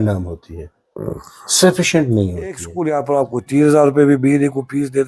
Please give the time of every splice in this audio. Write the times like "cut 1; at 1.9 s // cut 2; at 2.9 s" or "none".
cut 1; at 2.7 s